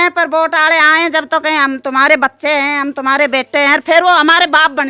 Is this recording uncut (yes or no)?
yes